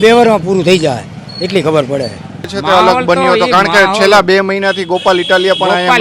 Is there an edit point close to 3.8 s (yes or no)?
no